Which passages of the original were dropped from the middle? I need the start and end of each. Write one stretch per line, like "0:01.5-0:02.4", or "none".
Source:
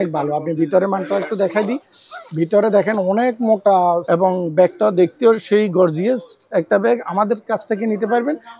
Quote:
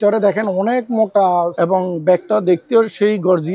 none